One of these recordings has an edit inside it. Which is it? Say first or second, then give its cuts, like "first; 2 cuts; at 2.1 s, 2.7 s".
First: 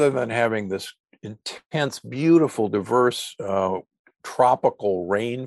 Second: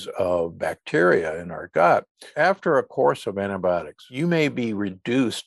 second; 2 cuts; at 2.3 s, 4.0 s